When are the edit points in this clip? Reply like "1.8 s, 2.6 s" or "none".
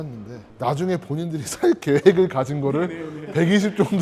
none